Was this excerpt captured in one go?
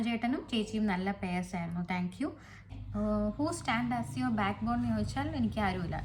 no; 1 cut; at 2.7 s

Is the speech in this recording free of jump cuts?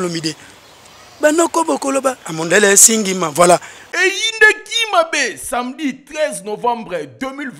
no; 1 cut; at 3.8 s

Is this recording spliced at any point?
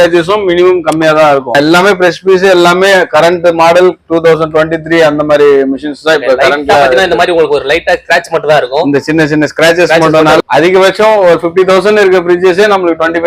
yes; 2 cuts; at 1.5 s, 10.4 s

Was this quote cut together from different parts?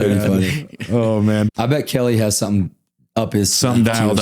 yes; 1 cut; at 1.5 s

